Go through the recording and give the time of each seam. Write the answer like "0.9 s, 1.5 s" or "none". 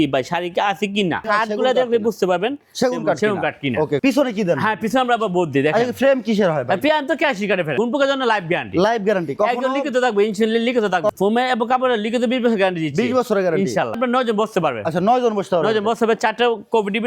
1.2 s, 4.0 s, 7.7 s, 11.1 s, 14.0 s